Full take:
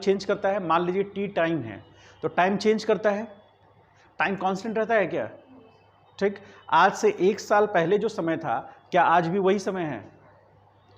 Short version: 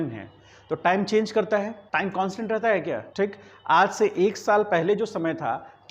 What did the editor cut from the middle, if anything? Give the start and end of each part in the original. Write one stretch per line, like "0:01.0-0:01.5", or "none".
0:03.3-0:04.1
0:05.3-0:06.1